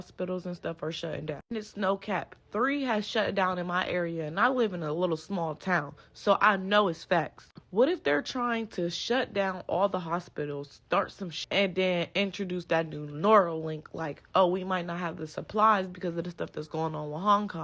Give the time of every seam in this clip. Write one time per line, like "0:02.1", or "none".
0:11.3